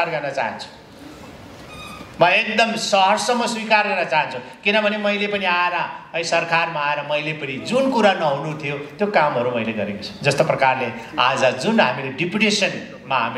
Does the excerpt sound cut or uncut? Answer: uncut